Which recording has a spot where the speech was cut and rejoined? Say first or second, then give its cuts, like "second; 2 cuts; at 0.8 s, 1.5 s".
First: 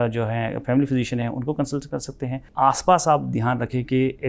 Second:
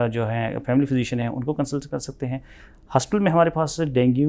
first; 1 cut; at 2.4 s